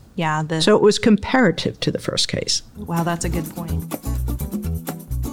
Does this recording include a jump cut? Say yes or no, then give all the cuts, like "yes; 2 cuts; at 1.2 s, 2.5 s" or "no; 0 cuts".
yes; 1 cut; at 3.5 s